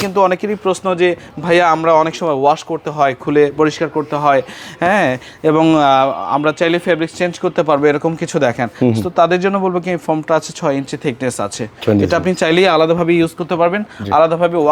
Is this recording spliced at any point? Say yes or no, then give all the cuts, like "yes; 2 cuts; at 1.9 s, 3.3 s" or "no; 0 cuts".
no; 0 cuts